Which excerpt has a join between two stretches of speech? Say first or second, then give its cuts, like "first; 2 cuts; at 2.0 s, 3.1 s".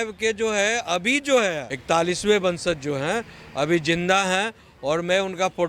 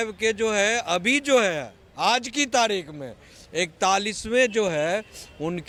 first; 1 cut; at 1.7 s